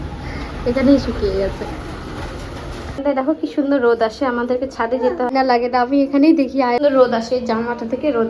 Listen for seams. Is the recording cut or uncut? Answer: cut